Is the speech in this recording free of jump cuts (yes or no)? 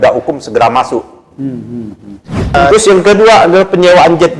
no